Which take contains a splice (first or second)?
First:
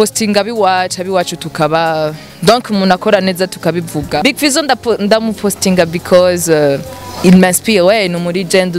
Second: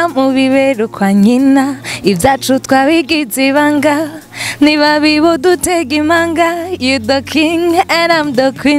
first